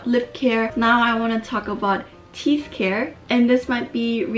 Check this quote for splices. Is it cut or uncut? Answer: uncut